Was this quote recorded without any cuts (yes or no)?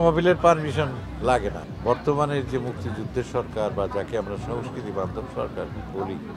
no